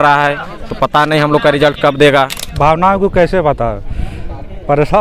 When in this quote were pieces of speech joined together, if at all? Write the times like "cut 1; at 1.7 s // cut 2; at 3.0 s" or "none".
cut 1; at 2.4 s